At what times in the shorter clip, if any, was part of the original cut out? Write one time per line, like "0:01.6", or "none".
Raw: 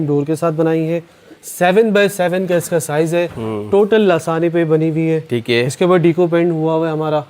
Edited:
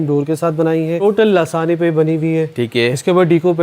0:01.0